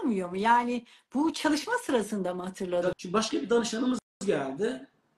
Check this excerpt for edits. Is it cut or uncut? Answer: cut